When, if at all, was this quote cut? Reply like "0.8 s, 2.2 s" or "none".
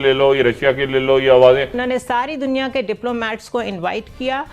1.8 s